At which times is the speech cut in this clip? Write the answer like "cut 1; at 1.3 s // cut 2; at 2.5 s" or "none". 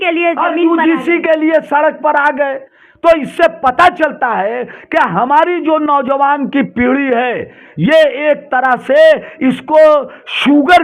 none